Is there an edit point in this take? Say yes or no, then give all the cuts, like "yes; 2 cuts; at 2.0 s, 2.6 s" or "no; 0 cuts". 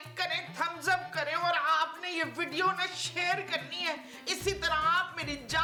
no; 0 cuts